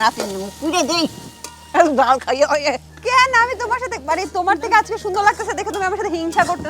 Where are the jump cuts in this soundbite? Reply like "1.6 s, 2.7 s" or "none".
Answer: none